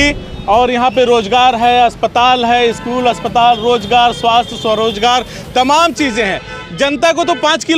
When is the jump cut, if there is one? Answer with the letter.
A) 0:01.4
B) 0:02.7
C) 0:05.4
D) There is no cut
D